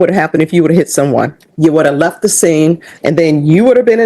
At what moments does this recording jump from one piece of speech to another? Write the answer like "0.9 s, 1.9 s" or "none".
1.4 s, 2.9 s